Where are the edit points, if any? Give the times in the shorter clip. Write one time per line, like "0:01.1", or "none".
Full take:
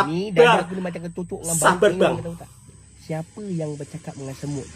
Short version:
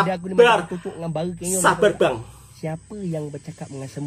0:02.2